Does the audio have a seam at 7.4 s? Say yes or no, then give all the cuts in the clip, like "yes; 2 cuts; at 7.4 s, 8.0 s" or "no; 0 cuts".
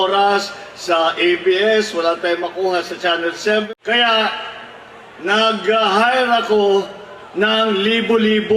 no; 1 cut; at 3.7 s